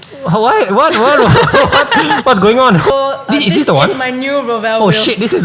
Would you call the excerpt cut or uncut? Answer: cut